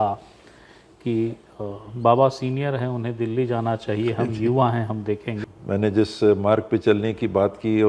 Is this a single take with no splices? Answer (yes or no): no